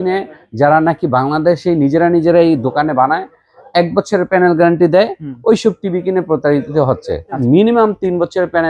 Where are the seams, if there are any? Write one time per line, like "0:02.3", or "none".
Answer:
0:07.4